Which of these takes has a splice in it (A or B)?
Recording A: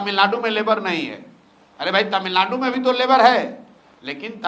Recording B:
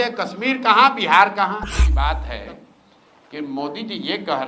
B